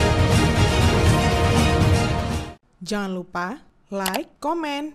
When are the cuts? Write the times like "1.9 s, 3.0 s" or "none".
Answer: 2.4 s

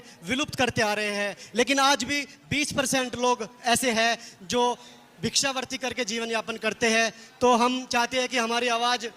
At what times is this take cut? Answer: none

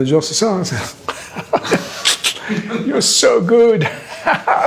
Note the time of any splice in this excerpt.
none

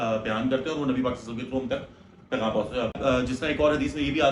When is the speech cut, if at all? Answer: 2.9 s

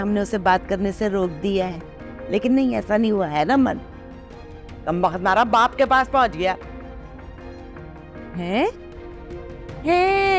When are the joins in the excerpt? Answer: none

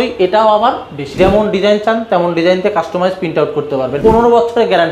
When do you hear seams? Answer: 1.0 s, 4.0 s

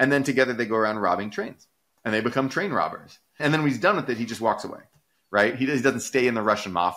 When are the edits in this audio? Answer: 3.4 s

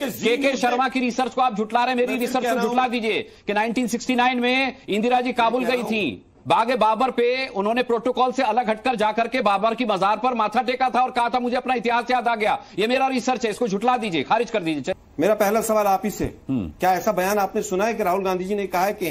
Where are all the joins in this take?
14.9 s

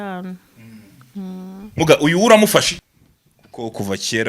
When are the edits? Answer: 2.8 s

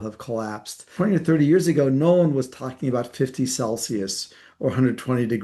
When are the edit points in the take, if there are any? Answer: 0.9 s

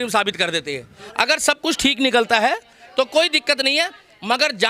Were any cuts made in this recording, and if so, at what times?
1.0 s

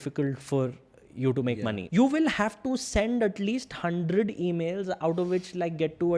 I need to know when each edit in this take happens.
1.8 s

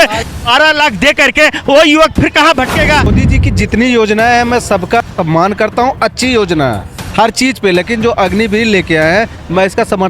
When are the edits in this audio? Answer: 3.2 s

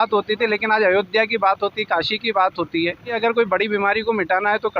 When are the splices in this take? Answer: 3.1 s

